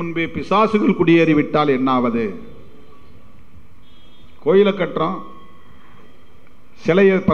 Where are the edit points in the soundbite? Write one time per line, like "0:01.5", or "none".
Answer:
none